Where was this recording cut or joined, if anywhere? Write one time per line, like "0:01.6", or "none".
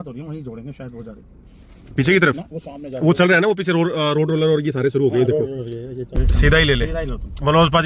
0:06.0